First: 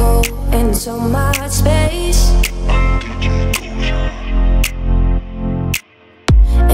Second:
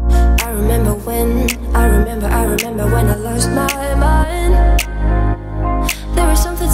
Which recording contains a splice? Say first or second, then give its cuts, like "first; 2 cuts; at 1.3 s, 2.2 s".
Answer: second; 1 cut; at 1.6 s